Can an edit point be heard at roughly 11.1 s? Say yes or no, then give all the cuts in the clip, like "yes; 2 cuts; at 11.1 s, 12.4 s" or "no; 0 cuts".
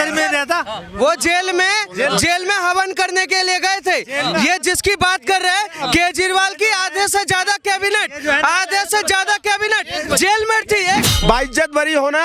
yes; 1 cut; at 11.1 s